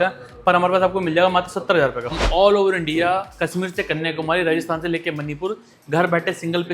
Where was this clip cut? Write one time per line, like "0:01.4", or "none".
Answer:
0:02.2

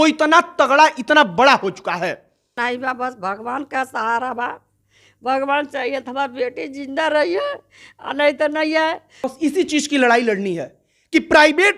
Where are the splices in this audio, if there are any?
0:02.5
0:09.2

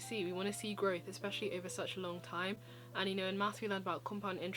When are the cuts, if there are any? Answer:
none

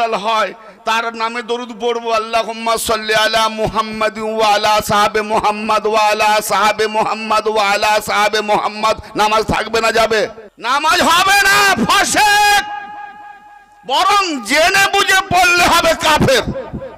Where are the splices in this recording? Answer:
0:10.5

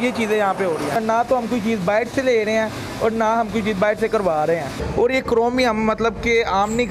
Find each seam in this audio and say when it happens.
0:01.0
0:04.8

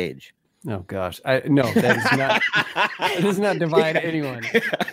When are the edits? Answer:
none

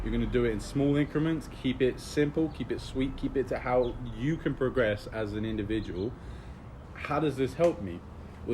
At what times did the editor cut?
0:06.8

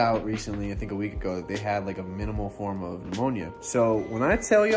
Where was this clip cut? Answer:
0:03.6

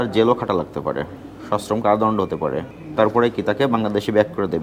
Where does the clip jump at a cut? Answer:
none

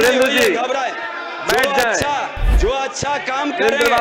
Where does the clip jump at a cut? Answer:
0:02.4

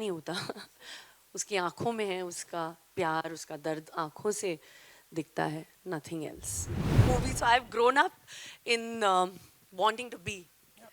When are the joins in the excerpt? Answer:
0:07.0

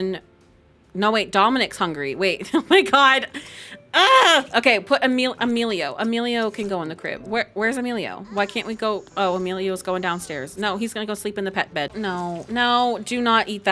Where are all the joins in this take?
0:11.9

